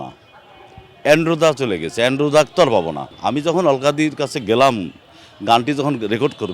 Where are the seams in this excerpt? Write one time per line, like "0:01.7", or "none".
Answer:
0:03.1